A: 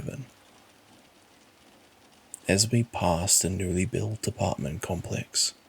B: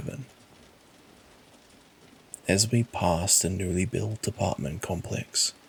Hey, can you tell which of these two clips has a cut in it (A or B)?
A